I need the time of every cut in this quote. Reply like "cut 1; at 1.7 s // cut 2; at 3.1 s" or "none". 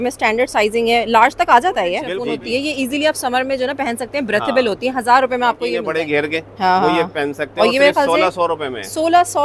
cut 1; at 2.1 s // cut 2; at 5.8 s